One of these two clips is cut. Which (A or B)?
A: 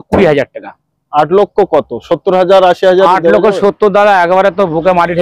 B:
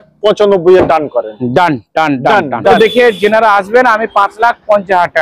B